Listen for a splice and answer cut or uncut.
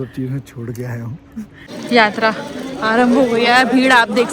cut